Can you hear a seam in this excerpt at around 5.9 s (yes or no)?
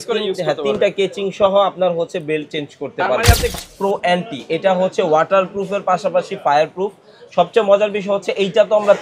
no